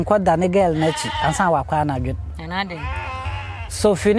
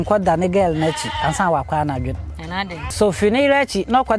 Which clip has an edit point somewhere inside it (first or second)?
second